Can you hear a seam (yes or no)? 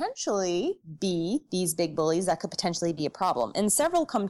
no